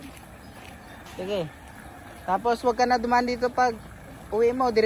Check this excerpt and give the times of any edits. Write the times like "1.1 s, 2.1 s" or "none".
none